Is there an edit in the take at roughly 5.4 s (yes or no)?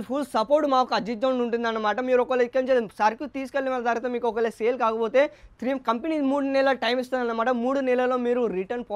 no